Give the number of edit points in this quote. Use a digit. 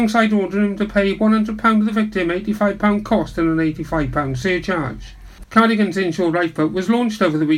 1